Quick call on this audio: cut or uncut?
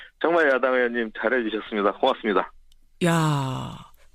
cut